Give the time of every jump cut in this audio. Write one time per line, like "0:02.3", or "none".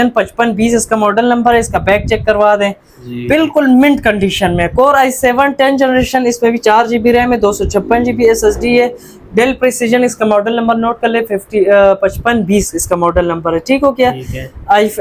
none